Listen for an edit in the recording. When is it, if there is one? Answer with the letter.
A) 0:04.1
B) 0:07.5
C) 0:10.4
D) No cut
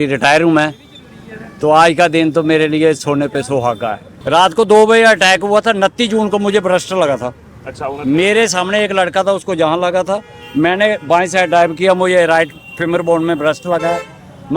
A